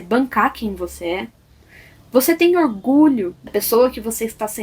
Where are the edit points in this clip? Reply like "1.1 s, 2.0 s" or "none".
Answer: 3.5 s